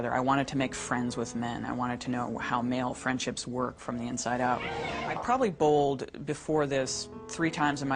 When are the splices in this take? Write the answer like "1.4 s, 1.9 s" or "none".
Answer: 5.1 s